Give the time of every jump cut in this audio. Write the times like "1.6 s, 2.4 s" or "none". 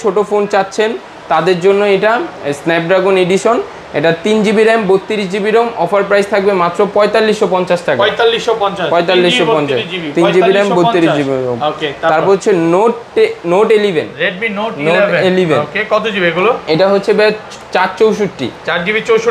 none